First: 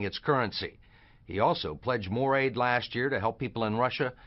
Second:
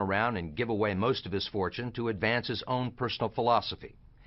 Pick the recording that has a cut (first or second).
second